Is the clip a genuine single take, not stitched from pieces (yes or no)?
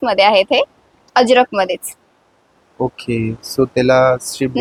yes